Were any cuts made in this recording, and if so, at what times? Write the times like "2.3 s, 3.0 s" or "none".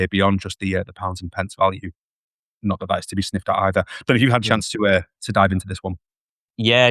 none

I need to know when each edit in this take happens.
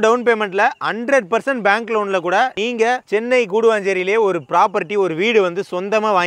2.6 s

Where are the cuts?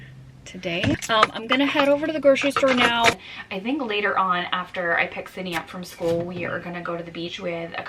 1.0 s, 3.2 s

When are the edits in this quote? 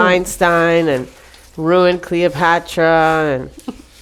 none

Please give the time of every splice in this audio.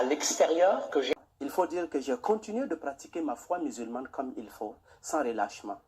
1.3 s

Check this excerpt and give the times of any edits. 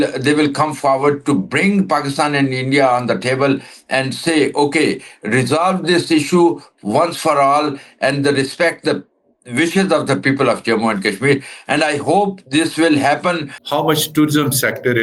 13.5 s

